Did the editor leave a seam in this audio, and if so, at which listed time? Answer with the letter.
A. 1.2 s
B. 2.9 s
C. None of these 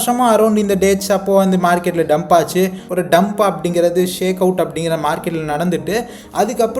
B